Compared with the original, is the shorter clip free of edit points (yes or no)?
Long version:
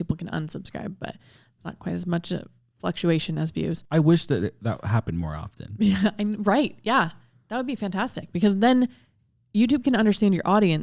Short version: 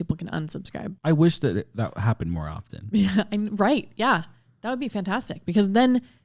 no